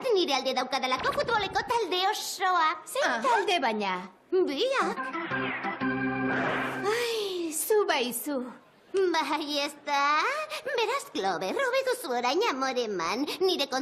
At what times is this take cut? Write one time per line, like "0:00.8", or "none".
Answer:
none

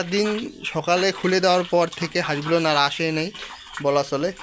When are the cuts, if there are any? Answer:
none

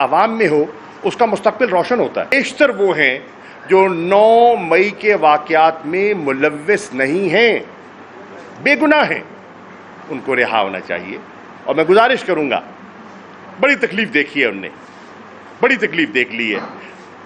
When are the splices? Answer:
0:02.3

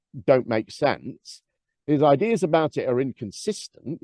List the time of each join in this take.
none

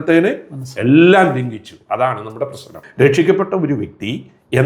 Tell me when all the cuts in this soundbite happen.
0:02.8

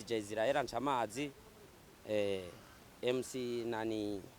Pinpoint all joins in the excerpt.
none

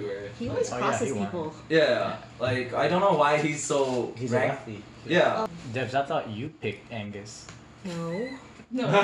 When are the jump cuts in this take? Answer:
0:05.5

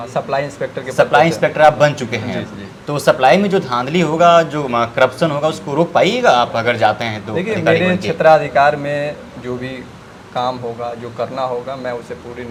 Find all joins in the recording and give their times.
none

